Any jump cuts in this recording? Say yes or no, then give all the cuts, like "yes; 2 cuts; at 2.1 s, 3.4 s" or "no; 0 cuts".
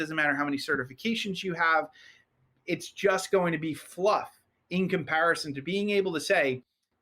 yes; 1 cut; at 5.5 s